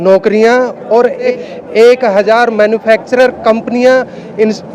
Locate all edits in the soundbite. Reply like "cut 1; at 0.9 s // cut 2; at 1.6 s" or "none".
cut 1; at 1.3 s

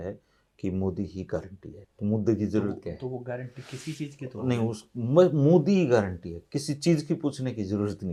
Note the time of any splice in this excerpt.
none

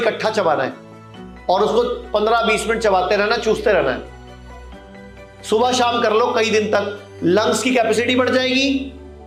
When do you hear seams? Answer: none

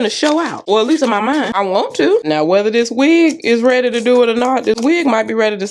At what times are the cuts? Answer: none

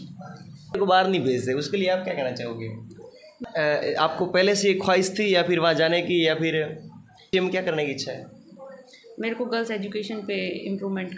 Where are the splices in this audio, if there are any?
cut 1; at 0.8 s // cut 2; at 3.3 s // cut 3; at 7.3 s

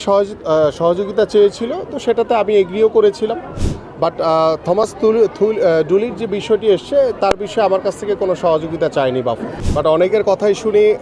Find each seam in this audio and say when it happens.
cut 1; at 9.5 s

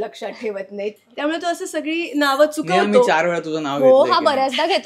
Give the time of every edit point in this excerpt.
cut 1; at 0.9 s

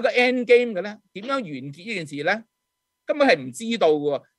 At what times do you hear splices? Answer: none

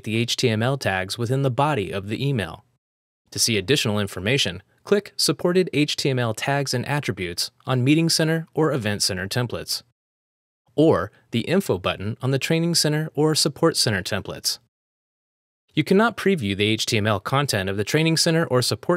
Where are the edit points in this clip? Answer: cut 1; at 5.4 s

